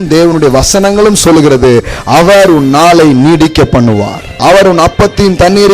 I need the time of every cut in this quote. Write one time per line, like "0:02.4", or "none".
0:04.4